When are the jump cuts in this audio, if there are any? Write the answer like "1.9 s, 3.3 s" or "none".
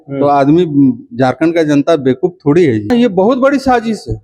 2.9 s